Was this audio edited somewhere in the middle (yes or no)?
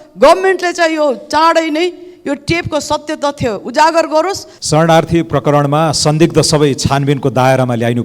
yes